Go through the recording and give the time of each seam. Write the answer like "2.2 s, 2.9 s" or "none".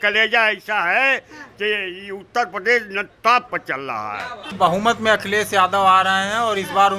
4.4 s